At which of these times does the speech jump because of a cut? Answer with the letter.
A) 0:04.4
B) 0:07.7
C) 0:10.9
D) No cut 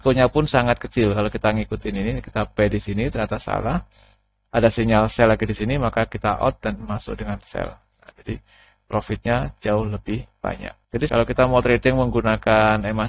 C